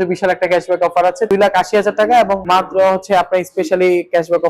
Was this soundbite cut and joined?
yes; 2 cuts; at 1.3 s, 2.4 s

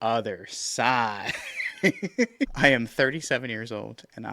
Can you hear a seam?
yes; 1 cut; at 2.5 s

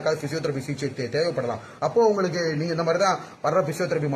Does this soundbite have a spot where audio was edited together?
no; 0 cuts

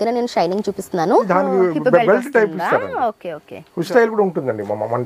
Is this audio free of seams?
no; 2 cuts; at 1.3 s, 3.9 s

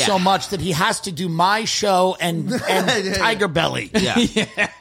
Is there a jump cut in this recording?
no; 0 cuts

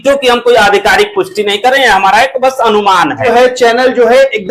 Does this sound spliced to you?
yes; 1 cut; at 3.3 s

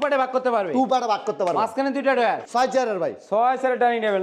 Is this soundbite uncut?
no; 1 cut; at 2.4 s

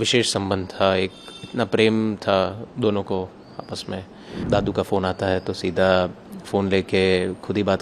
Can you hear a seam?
yes; 1 cut; at 4.4 s

